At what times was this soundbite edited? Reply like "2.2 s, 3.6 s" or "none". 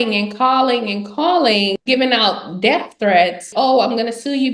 1.8 s, 3.4 s